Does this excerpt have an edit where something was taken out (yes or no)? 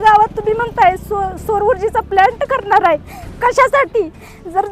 no